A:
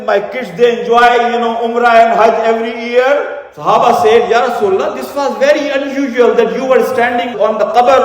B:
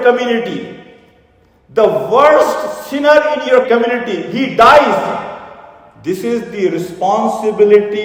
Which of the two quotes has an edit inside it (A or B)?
A